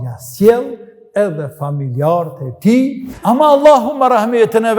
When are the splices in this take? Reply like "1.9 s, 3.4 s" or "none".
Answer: 3.1 s